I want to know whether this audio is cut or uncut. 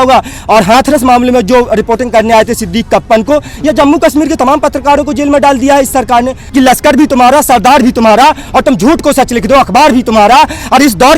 cut